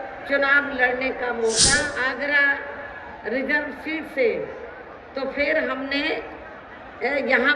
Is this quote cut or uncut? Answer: cut